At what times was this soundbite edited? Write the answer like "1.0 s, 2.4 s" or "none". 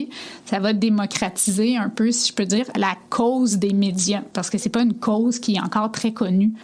4.6 s